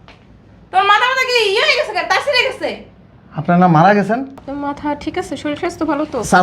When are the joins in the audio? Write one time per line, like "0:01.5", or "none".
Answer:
0:04.4